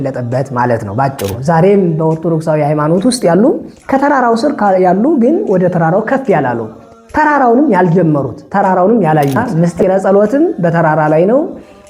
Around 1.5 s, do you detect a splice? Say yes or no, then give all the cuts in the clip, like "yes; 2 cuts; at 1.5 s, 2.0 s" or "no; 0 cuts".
yes; 2 cuts; at 1.5 s, 9.5 s